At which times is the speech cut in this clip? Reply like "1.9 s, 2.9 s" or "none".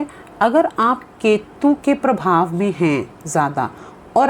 none